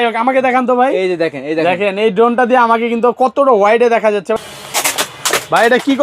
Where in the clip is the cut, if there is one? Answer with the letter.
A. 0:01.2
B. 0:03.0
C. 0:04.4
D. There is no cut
C